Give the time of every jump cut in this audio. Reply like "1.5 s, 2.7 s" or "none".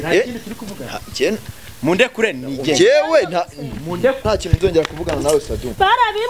4.2 s